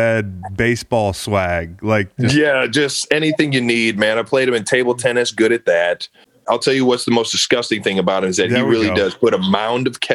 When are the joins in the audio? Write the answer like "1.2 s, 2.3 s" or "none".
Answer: 6.4 s

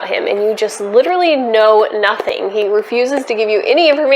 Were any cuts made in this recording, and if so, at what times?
none

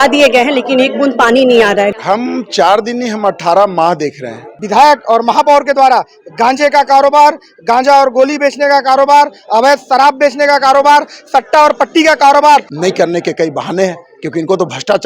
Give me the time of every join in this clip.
1.9 s, 4.6 s, 12.7 s

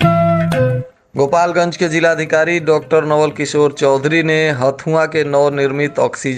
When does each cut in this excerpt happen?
0.9 s

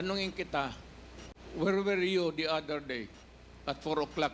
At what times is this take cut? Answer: none

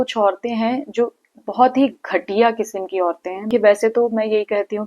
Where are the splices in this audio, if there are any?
3.5 s

